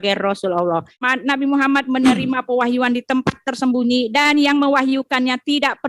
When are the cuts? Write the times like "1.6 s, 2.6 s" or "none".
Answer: 1.1 s